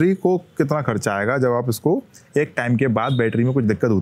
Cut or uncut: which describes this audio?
uncut